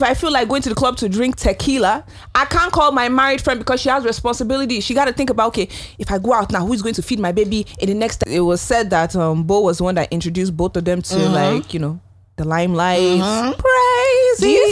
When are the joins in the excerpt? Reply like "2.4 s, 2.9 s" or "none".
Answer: 8.2 s, 13.6 s